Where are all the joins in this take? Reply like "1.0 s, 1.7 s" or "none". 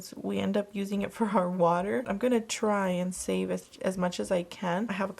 none